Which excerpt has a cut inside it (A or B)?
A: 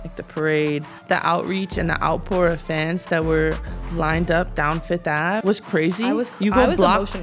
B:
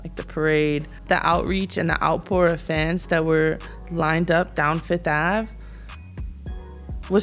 A